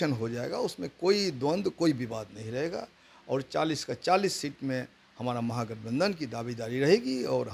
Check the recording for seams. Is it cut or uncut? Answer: uncut